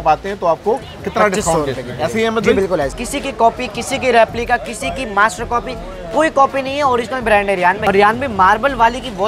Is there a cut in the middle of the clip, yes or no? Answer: yes